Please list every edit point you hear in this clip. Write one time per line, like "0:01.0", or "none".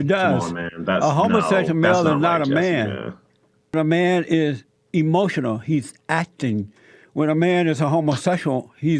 0:03.7